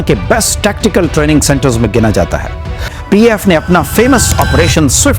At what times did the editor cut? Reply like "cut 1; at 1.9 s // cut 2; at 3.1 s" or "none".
cut 1; at 2.9 s